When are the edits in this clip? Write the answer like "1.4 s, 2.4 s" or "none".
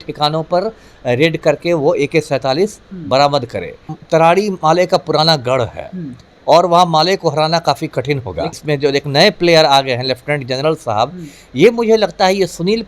3.9 s, 8.6 s

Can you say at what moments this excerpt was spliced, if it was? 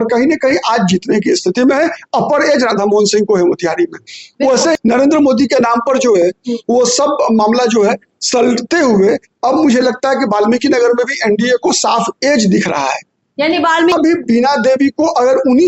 4.7 s, 13.9 s

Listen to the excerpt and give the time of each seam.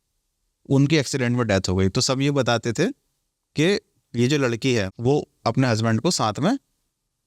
4.9 s

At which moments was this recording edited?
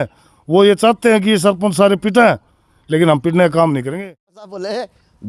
3.9 s

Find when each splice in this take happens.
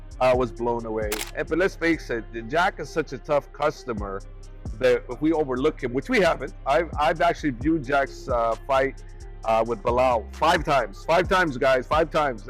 1.2 s

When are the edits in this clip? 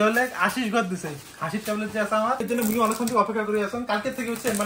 2.4 s

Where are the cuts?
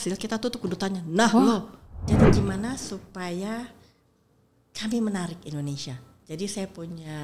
2.1 s, 6.2 s

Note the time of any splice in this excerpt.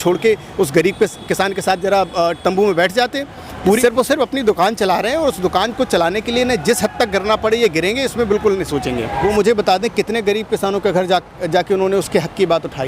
3.8 s, 9.2 s

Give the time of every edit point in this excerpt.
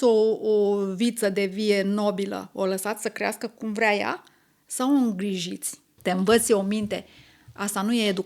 5.9 s

